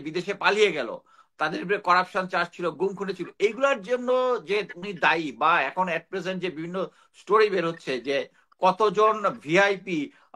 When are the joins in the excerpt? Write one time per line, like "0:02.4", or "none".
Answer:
none